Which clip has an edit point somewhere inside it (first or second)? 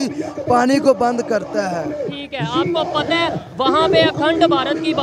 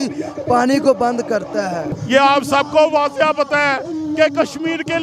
second